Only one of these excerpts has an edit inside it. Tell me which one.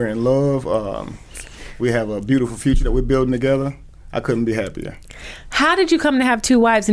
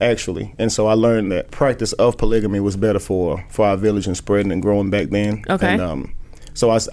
second; 1 cut; at 1.5 s

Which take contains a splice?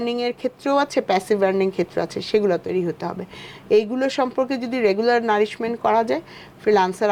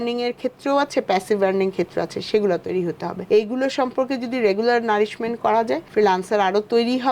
second; 2 cuts; at 3.1 s, 5.8 s

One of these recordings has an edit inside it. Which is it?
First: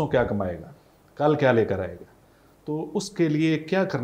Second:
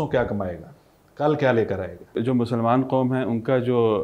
second; 1 cut; at 2.1 s

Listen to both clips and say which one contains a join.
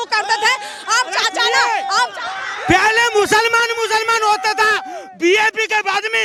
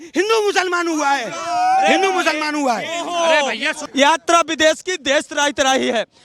second; 1 cut; at 3.7 s

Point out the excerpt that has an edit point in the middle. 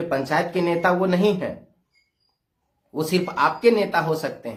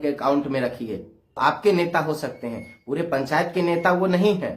second; 1 cut; at 1.6 s

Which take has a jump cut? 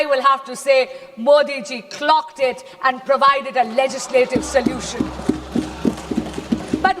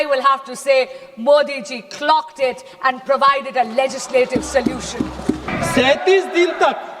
second; 1 cut; at 5.5 s

